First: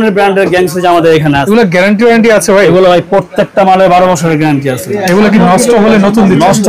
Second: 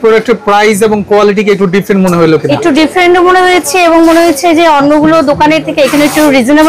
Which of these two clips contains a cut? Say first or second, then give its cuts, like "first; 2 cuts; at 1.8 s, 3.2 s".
first; 1 cut; at 1.4 s